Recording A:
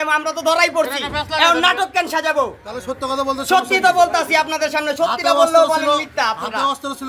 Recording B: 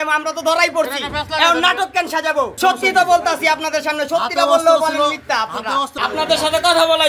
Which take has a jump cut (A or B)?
B